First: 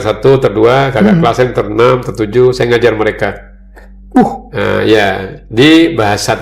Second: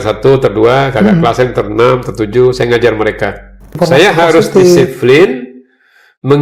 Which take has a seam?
second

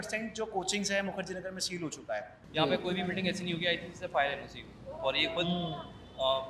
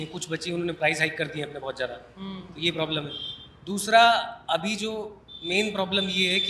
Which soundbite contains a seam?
first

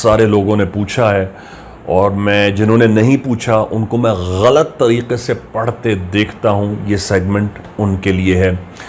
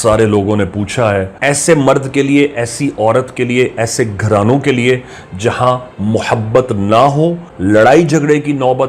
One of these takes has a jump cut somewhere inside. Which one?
second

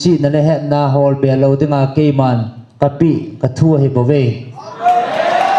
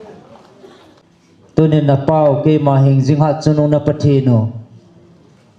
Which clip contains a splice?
second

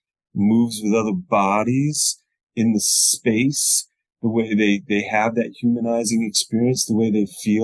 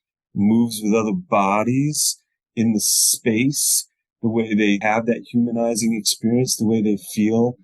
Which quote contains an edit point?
second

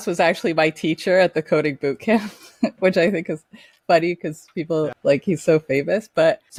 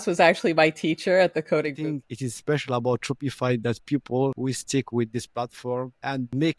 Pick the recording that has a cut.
second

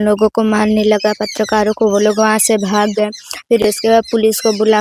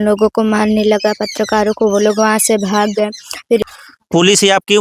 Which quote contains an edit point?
second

